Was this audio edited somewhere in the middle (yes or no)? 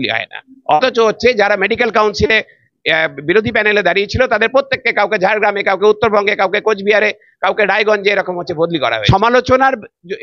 yes